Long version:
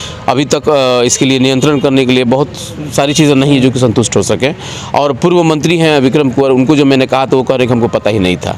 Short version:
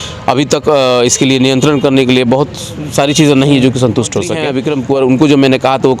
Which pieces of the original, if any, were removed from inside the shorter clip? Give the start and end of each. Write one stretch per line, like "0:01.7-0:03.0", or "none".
0:04.4-0:05.9